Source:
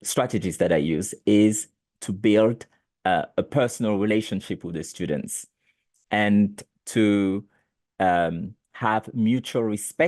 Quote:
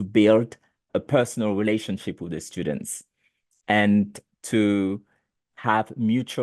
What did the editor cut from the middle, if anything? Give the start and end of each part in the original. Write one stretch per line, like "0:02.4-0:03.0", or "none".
0:02.9-0:03.3
0:07.8-0:08.5

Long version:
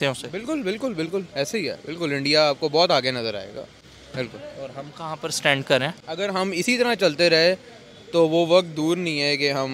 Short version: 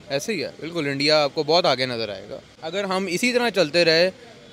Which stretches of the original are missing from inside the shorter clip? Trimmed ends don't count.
0:03.8-0:06.0

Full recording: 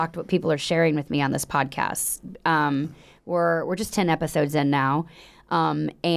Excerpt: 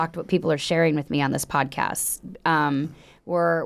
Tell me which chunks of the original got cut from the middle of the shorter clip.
none

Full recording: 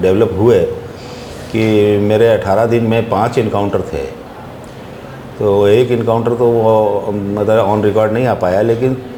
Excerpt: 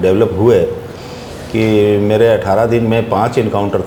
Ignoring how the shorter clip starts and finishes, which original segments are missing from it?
none

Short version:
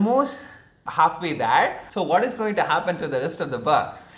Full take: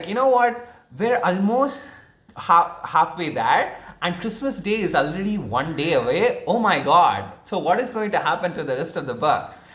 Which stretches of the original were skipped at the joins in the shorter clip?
0:02.3-0:02.8
0:03.8-0:07.4

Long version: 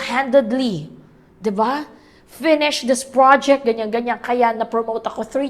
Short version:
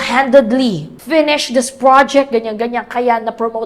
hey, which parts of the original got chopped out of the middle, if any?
0:00.9-0:02.2

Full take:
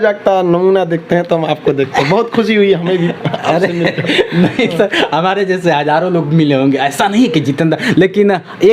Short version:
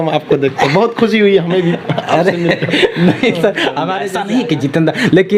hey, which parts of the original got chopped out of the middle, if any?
0:05.4-0:06.9

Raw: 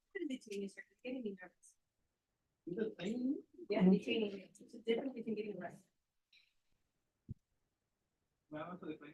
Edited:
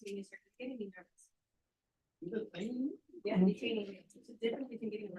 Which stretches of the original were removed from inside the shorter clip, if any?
none

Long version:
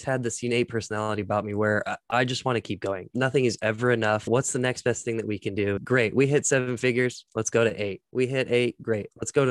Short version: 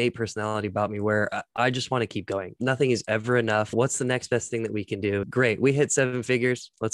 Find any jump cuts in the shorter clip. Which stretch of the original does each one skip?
none

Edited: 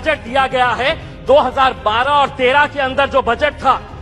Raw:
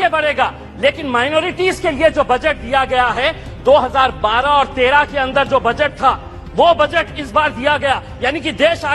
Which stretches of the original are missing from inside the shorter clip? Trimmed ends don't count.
none

